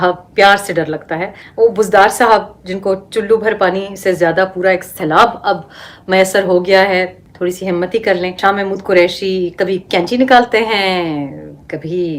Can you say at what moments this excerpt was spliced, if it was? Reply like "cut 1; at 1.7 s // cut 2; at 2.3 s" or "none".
cut 1; at 1.4 s // cut 2; at 8.4 s